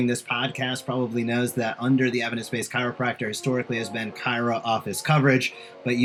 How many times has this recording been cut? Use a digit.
0